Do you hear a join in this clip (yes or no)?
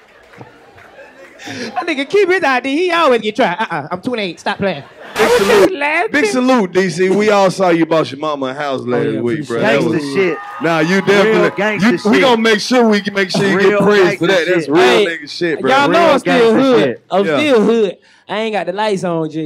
yes